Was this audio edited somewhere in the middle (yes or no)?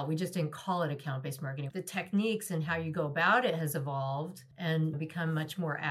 yes